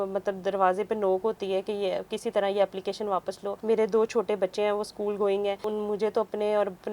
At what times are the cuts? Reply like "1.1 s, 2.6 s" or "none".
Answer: 3.5 s, 5.7 s

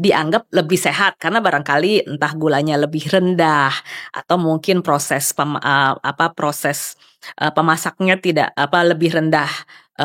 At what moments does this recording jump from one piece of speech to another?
none

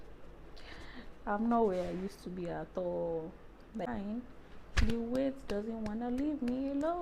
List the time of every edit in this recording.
3.9 s

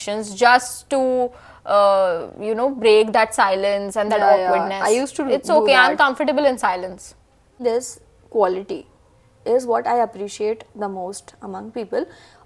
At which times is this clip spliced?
7.5 s

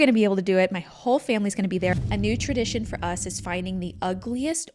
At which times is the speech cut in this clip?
1.9 s

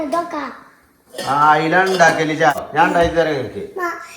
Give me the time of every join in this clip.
2.5 s

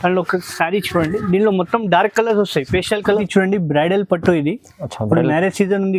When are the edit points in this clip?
3.2 s

